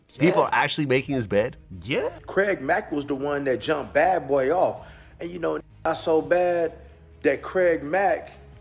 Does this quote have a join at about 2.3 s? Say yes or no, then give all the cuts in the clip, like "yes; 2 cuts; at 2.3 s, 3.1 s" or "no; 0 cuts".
yes; 1 cut; at 2.3 s